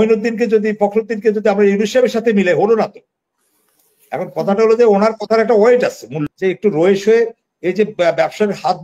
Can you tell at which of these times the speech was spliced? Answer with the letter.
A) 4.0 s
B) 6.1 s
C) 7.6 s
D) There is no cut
B